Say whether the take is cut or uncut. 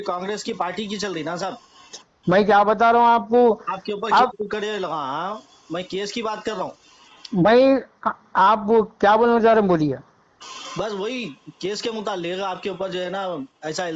uncut